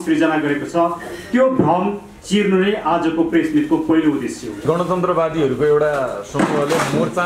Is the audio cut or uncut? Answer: cut